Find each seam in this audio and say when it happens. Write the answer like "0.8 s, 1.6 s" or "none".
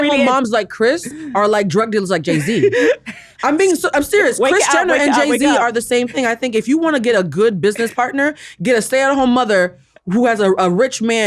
none